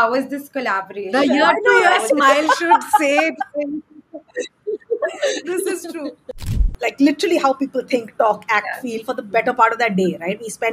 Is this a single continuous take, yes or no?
no